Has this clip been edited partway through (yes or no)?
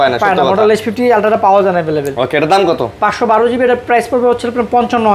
no